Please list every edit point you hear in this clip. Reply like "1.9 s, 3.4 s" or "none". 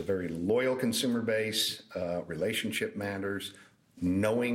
none